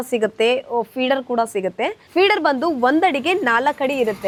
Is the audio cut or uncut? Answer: uncut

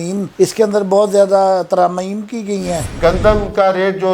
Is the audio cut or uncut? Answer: cut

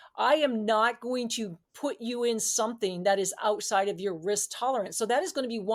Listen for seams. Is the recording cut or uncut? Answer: uncut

